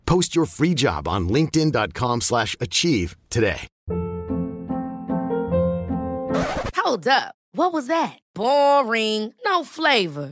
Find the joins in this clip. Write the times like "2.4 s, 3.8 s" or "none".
3.7 s